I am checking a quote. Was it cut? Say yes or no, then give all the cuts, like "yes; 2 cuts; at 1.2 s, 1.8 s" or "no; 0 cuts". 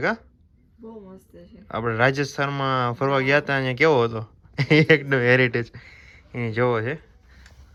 no; 0 cuts